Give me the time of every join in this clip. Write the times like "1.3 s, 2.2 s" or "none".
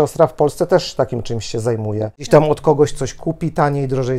2.3 s

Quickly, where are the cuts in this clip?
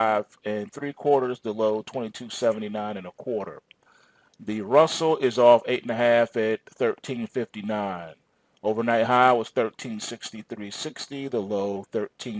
10.3 s

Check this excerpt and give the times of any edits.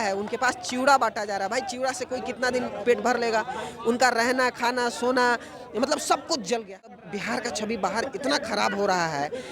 6.9 s

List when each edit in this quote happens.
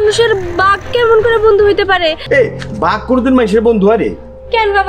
2.2 s

